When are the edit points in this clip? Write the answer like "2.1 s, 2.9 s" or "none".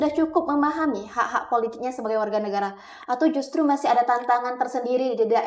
none

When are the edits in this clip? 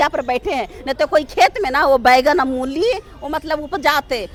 none

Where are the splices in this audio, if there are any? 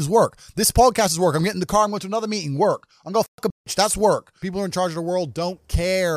4.4 s

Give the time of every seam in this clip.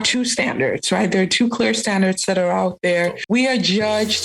3.2 s

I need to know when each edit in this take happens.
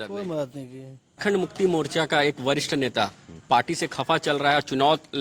1.2 s

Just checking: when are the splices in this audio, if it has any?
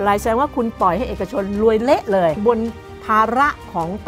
2.4 s

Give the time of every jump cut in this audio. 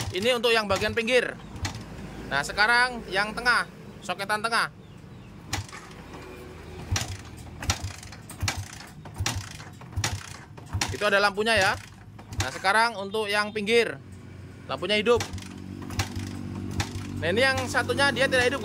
none

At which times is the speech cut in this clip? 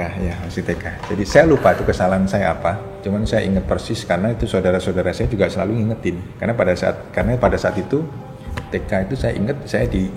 2.9 s, 6.3 s

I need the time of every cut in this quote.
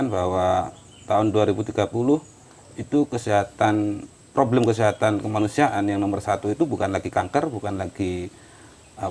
none

